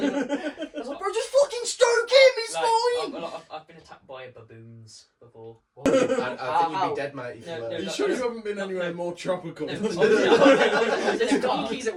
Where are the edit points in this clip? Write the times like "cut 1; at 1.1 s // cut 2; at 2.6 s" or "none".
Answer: none